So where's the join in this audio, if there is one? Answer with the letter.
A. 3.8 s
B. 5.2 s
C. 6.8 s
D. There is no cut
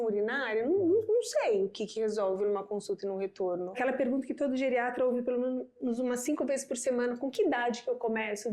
A